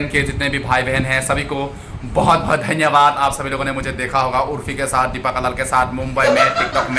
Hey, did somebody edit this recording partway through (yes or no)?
no